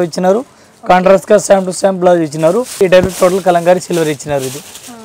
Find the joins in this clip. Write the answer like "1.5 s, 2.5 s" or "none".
2.7 s